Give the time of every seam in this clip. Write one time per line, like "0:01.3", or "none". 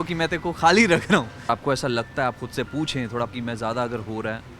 0:01.4
0:03.3